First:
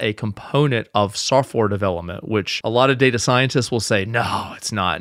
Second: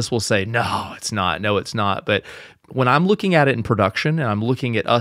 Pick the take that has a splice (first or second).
first